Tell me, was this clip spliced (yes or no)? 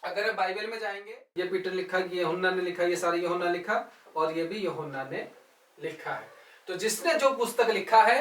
yes